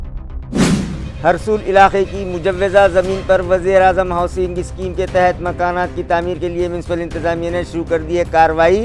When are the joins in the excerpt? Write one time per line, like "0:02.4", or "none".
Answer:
0:01.0